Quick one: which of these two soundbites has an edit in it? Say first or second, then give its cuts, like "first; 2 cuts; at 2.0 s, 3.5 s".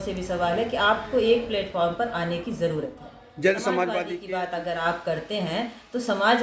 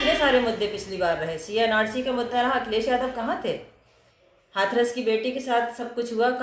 first; 1 cut; at 4.1 s